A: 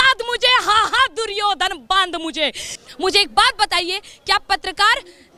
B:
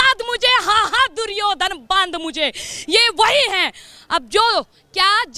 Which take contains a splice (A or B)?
A